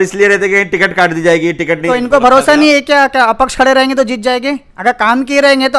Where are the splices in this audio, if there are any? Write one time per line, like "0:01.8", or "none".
0:01.8